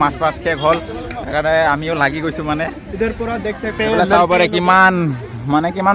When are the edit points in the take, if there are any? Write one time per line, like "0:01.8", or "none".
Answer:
none